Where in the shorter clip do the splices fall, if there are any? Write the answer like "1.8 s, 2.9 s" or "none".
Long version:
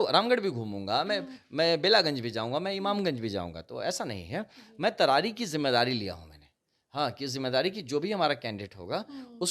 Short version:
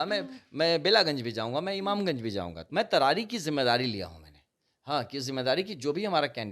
2.6 s